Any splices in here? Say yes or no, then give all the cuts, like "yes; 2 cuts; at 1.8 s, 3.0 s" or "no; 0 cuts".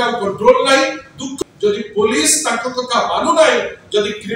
yes; 1 cut; at 1.3 s